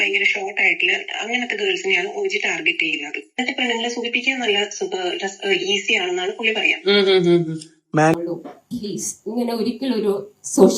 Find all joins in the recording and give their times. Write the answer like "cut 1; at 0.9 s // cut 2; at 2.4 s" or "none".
cut 1; at 8.1 s